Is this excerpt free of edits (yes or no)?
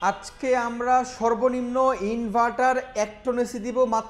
yes